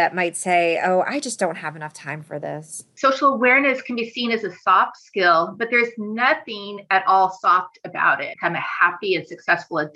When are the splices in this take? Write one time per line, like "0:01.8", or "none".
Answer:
0:02.9
0:08.3